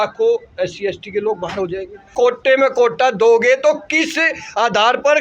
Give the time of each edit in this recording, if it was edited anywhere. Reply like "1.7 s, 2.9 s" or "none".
2.0 s